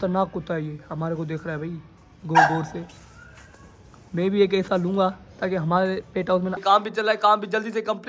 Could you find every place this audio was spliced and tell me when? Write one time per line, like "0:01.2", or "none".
0:06.6